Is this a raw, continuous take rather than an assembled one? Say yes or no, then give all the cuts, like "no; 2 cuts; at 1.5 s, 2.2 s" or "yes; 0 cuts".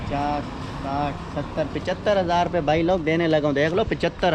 yes; 0 cuts